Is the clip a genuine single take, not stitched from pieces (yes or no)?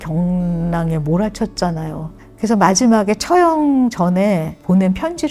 yes